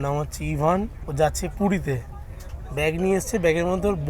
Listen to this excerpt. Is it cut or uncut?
cut